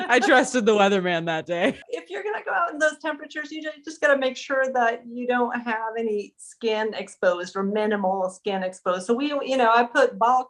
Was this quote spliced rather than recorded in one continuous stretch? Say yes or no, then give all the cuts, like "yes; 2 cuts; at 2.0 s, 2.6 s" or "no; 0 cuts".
yes; 1 cut; at 1.8 s